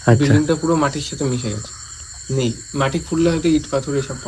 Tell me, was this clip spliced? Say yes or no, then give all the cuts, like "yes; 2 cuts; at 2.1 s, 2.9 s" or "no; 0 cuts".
no; 0 cuts